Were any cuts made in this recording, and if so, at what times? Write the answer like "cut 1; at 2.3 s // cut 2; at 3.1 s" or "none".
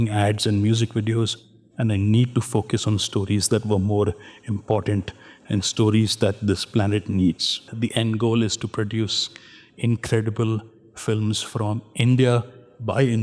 cut 1; at 7.7 s

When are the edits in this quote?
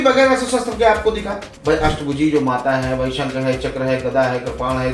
cut 1; at 1.5 s

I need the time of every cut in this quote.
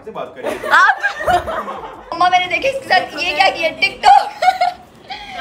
cut 1; at 2.2 s

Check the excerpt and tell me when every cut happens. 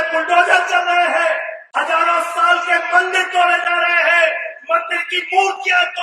cut 1; at 1.6 s

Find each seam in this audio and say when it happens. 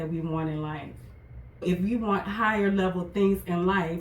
cut 1; at 1.6 s

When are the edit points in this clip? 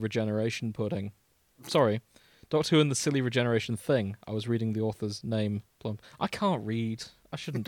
none

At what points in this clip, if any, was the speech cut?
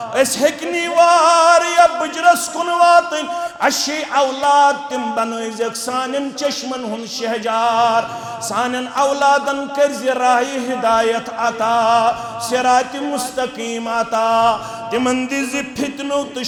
none

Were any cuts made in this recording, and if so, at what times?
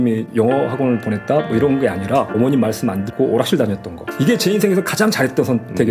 none

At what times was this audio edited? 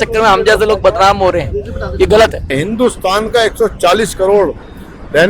cut 1; at 2.5 s

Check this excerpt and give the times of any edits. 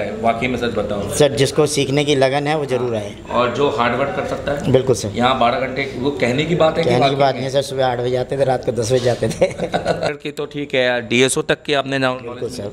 cut 1; at 10.2 s

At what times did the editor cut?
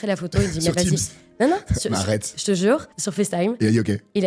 cut 1; at 3.0 s

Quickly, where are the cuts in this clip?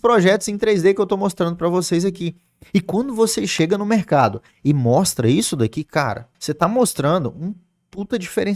cut 1; at 6.3 s

